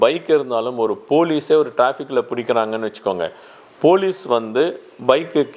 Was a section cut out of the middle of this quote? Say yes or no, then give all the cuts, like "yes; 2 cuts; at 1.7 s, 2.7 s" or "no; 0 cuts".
no; 0 cuts